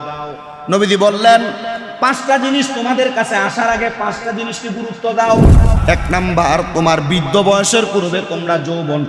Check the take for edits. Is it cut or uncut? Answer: cut